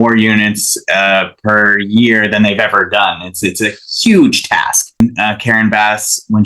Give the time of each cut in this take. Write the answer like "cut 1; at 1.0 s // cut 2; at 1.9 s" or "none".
cut 1; at 5.0 s